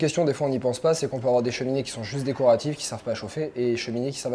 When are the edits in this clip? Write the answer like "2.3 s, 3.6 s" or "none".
none